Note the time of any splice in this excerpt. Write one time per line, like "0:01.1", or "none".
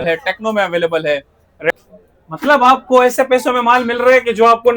0:01.7